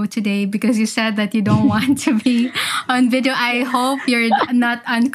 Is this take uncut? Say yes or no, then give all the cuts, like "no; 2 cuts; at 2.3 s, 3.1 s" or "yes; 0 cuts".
yes; 0 cuts